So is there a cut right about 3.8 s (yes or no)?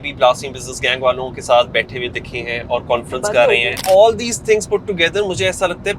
yes